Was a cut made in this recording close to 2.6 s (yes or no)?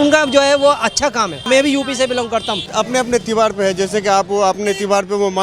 yes